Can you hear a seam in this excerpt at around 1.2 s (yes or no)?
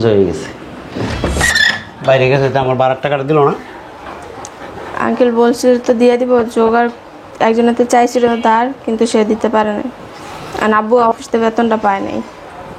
yes